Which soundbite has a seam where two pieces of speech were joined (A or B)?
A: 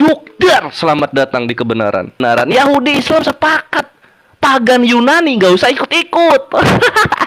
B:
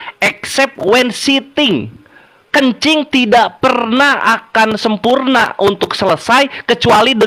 A